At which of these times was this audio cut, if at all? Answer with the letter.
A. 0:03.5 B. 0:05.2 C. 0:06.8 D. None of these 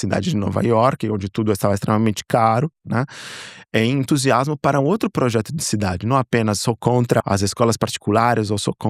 C